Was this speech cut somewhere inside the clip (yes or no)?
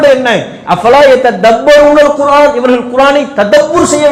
no